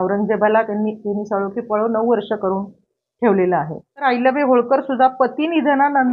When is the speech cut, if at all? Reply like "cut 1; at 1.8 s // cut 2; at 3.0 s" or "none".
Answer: cut 1; at 4.0 s

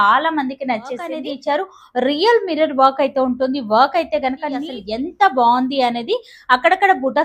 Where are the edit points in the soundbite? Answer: cut 1; at 1.1 s // cut 2; at 4.8 s

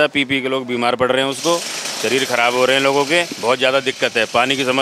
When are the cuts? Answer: none

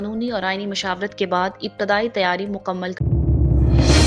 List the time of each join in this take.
cut 1; at 2.9 s

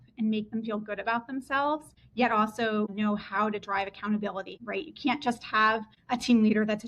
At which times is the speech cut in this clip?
cut 1; at 2.0 s // cut 2; at 2.9 s // cut 3; at 4.6 s // cut 4; at 5.9 s

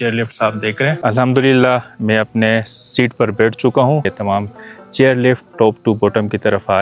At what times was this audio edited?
cut 1; at 1.0 s // cut 2; at 4.1 s

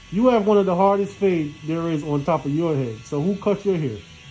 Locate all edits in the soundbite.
none

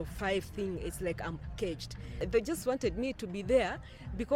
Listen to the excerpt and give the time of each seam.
cut 1; at 2.2 s

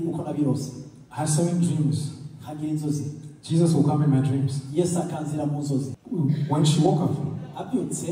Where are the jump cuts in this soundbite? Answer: cut 1; at 6.0 s

